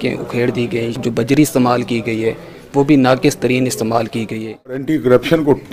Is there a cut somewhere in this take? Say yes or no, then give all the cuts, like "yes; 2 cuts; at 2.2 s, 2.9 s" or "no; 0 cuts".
yes; 2 cuts; at 1.4 s, 4.8 s